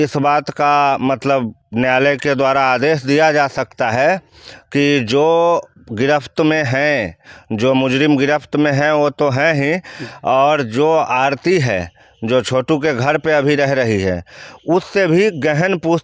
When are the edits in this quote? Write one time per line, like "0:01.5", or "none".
none